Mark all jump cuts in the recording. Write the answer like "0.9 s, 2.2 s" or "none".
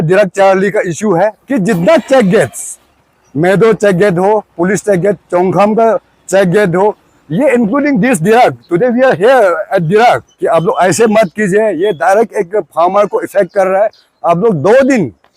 1.4 s, 10.3 s